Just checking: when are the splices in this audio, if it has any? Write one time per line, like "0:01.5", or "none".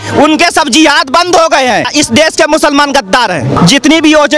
0:01.9
0:03.6